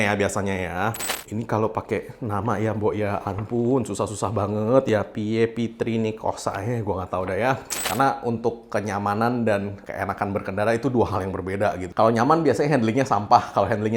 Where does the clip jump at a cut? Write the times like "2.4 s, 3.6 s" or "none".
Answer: 1.1 s, 7.7 s, 11.9 s